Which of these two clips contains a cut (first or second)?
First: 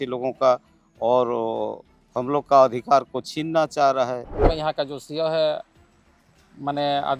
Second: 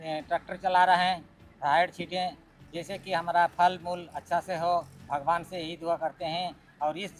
first